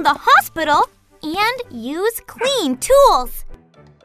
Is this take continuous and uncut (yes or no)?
yes